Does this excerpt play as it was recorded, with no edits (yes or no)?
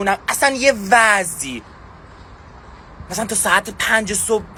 yes